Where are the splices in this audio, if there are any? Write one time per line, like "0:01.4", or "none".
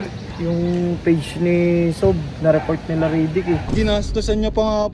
0:03.7